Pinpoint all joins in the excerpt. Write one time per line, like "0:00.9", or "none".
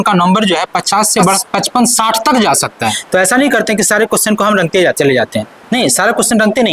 0:01.4
0:03.0